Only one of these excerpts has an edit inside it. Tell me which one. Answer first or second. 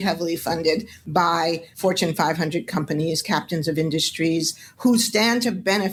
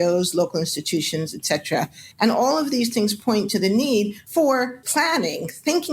second